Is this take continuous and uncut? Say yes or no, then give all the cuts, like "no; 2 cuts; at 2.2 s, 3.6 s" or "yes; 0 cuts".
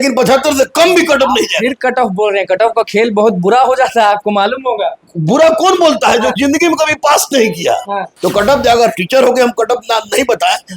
no; 1 cut; at 8.1 s